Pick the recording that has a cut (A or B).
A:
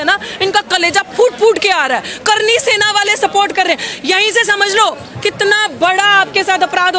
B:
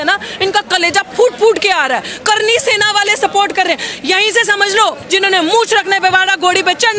B